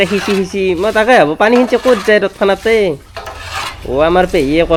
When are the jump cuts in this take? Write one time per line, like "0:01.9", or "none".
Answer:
none